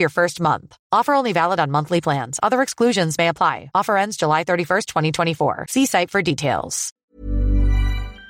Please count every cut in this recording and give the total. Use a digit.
1